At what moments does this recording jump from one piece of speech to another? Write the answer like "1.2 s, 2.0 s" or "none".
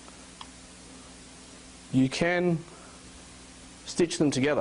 2.9 s